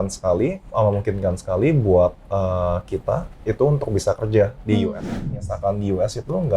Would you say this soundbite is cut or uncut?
cut